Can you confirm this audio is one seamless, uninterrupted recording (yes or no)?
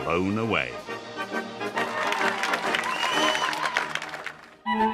yes